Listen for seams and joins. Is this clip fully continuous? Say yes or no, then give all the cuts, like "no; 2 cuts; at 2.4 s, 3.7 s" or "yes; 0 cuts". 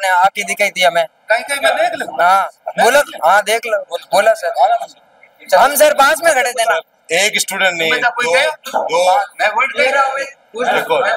yes; 0 cuts